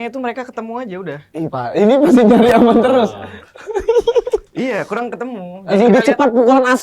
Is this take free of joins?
no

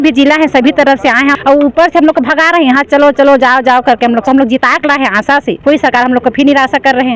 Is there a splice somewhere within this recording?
yes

